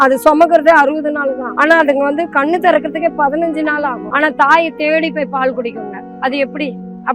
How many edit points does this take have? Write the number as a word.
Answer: two